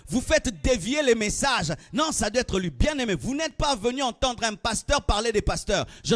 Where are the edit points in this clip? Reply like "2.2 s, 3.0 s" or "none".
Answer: none